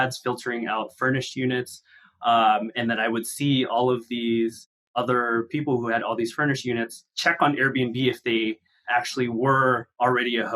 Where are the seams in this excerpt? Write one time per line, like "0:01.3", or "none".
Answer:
0:04.9